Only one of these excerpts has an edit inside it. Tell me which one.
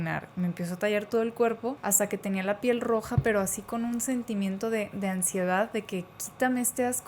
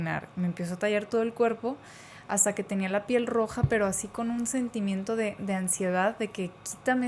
first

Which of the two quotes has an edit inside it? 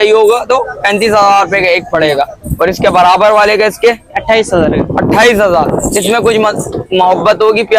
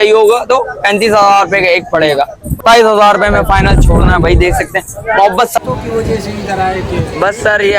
second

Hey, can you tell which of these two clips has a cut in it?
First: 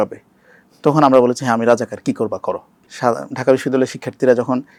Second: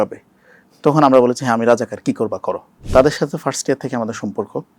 second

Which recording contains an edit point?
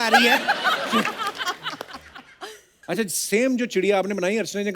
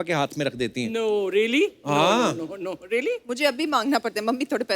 first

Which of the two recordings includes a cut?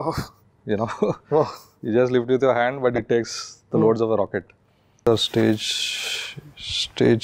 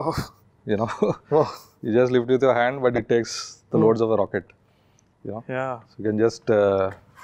first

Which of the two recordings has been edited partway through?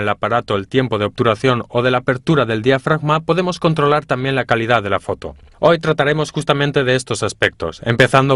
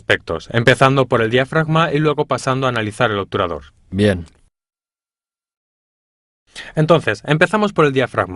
second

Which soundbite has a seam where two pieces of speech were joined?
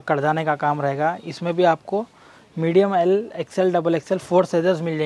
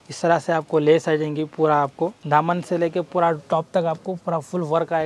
second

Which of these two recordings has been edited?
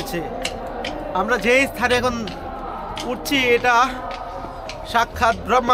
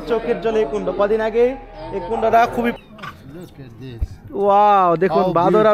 second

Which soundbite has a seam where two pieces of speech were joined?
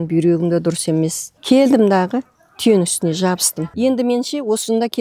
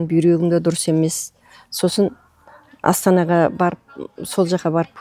first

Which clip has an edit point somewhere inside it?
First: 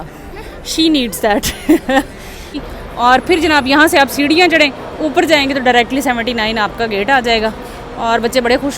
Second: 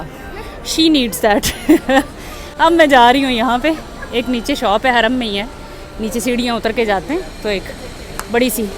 first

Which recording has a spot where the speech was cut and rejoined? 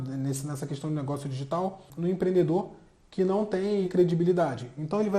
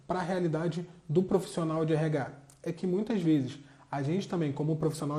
first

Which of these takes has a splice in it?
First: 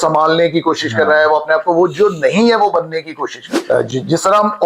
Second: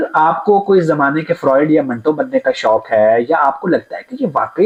first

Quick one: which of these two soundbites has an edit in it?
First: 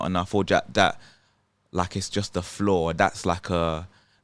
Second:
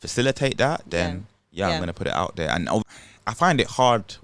second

